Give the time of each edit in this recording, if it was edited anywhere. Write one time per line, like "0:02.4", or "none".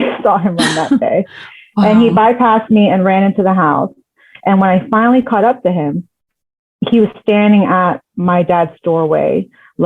none